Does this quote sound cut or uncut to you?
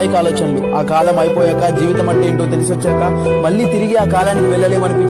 uncut